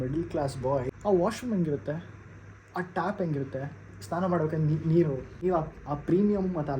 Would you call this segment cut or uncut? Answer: cut